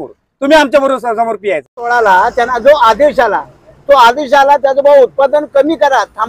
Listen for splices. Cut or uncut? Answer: cut